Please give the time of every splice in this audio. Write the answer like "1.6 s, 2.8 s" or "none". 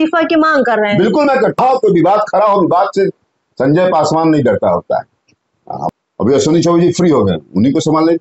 1.6 s, 5.8 s